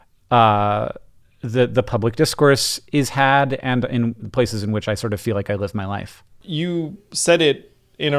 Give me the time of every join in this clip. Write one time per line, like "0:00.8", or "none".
0:06.2